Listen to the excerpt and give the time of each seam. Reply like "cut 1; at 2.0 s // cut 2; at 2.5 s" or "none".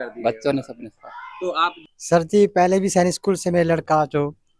cut 1; at 1.8 s